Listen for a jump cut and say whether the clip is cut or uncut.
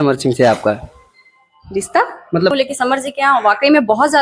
cut